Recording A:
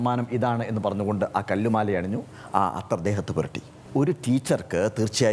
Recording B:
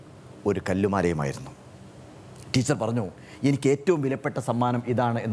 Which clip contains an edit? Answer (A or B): A